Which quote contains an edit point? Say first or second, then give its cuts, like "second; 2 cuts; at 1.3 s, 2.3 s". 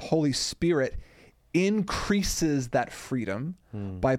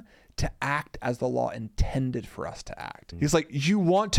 second; 1 cut; at 3.0 s